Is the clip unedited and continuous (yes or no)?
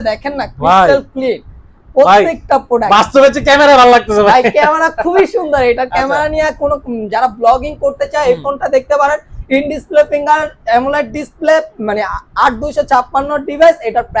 yes